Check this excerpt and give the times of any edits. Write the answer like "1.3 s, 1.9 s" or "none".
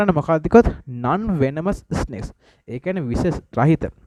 none